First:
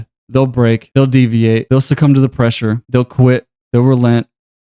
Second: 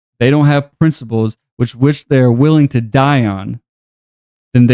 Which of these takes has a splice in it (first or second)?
first